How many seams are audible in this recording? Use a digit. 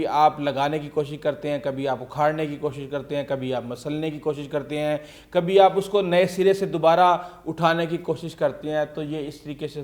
0